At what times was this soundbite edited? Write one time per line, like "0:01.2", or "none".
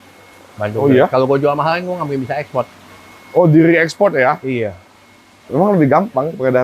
0:05.4